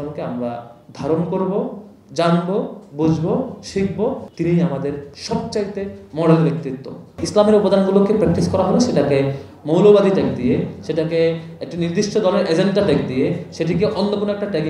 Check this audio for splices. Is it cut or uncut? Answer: cut